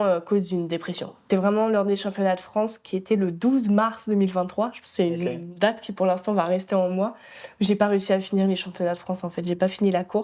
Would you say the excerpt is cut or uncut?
cut